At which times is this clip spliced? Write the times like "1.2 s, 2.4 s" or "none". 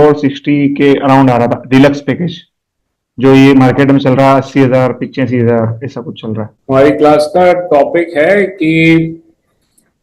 6.5 s